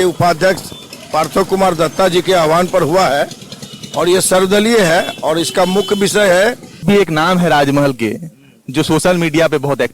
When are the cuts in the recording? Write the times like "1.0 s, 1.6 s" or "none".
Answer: 6.8 s